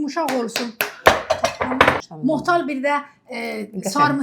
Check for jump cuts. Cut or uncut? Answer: cut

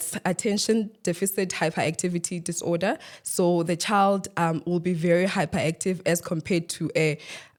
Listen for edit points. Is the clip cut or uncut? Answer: uncut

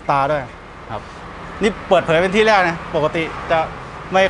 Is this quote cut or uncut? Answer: uncut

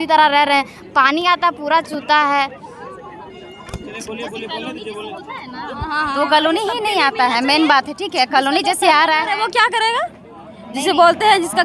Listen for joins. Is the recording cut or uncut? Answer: uncut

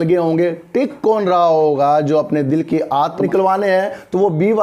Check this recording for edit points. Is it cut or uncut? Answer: cut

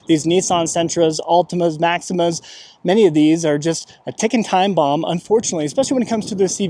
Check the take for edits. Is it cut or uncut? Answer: uncut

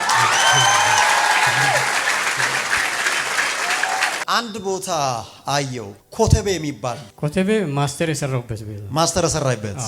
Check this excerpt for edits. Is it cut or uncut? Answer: cut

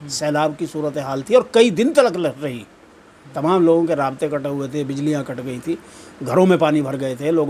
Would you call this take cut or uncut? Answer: uncut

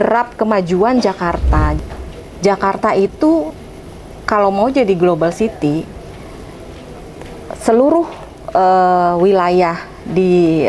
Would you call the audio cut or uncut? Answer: cut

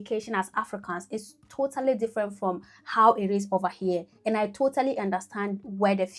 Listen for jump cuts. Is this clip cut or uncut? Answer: uncut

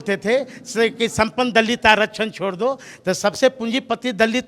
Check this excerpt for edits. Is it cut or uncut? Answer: uncut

